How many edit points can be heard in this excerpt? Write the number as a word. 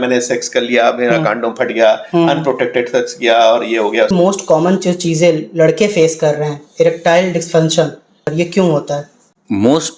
two